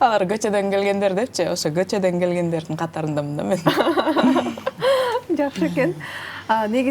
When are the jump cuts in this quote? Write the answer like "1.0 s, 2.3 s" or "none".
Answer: none